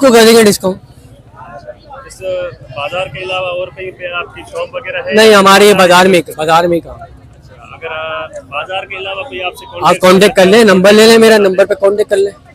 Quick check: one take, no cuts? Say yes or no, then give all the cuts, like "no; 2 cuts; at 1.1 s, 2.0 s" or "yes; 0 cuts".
yes; 0 cuts